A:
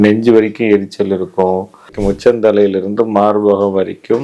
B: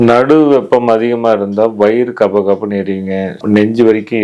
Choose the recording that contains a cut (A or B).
A